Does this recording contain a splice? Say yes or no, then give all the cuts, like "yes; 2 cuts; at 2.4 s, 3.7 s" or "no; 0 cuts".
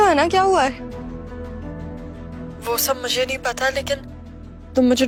no; 0 cuts